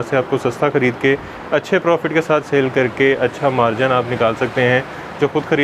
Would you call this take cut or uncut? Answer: uncut